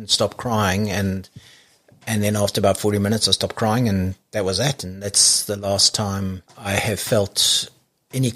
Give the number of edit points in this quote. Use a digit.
1